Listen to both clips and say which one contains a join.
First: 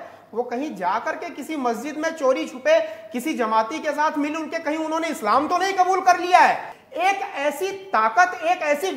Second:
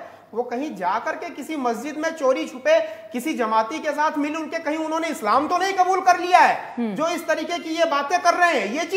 first; 1 cut; at 6.7 s

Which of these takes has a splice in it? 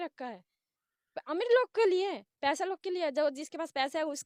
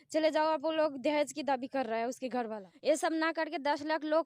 second; 1 cut; at 2.7 s

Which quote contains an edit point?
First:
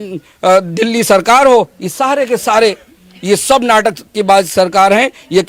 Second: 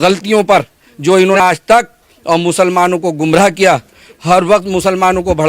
second; 1 cut; at 1.4 s

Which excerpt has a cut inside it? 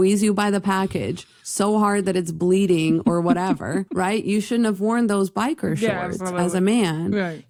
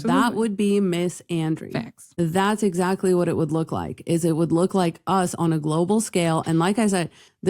second; 1 cut; at 2.0 s

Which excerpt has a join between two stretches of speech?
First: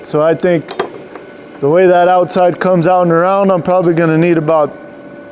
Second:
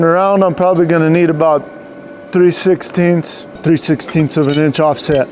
second; 1 cut; at 3.6 s

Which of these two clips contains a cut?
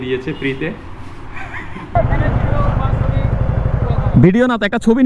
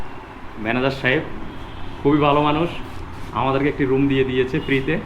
first; 1 cut; at 1.9 s

